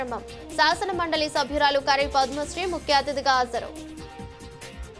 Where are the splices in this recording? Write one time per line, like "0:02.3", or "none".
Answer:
none